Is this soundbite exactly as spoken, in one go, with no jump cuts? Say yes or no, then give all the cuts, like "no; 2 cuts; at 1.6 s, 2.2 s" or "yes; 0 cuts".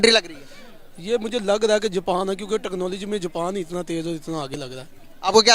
yes; 0 cuts